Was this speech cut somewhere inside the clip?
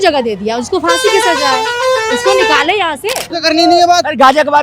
yes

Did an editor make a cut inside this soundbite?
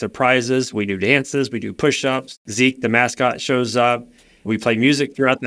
yes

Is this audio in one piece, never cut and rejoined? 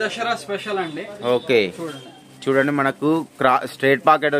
no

